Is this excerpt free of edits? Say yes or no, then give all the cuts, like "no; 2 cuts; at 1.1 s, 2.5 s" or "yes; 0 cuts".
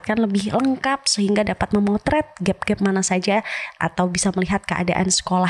yes; 0 cuts